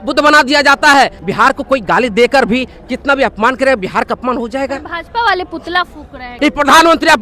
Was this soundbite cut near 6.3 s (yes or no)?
yes